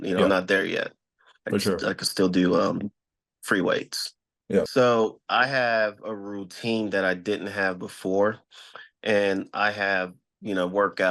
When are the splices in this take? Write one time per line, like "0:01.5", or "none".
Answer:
0:04.7